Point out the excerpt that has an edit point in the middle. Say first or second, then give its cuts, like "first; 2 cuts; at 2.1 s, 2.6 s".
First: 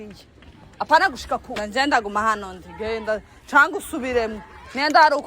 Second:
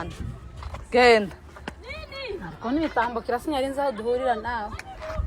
first; 1 cut; at 1.6 s